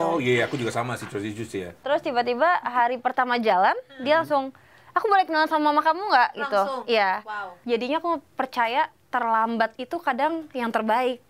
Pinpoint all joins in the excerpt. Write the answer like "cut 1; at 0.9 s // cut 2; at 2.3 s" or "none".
cut 1; at 1.8 s // cut 2; at 7.6 s